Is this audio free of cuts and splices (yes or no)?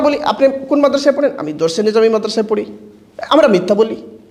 yes